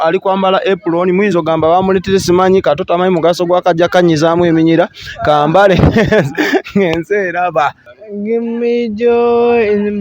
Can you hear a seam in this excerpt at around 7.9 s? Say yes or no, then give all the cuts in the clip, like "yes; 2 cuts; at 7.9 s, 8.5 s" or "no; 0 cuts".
yes; 1 cut; at 7.9 s